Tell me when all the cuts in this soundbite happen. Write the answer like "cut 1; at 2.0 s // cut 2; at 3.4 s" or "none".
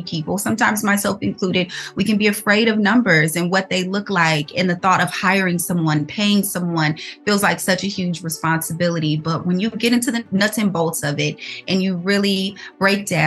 cut 1; at 10.2 s